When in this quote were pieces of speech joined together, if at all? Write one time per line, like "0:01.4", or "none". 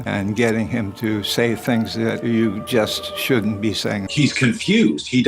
0:04.2